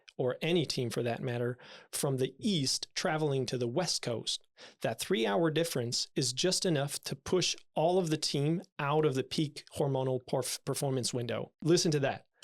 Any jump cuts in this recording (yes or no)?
yes